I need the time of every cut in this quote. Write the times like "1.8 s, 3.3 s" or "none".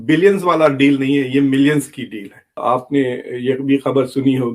2.6 s